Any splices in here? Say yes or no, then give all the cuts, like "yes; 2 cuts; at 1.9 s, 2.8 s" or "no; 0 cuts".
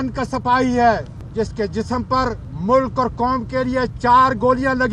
yes; 2 cuts; at 1.2 s, 2.5 s